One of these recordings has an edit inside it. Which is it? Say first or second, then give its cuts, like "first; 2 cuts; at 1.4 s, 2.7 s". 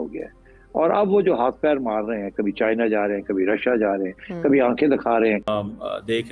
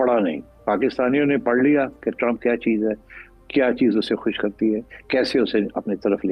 first; 1 cut; at 5.4 s